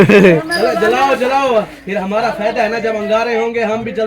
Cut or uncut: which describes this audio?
uncut